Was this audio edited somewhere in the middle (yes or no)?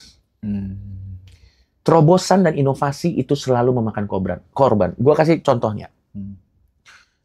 no